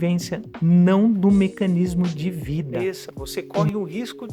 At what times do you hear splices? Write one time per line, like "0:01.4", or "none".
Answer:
0:02.7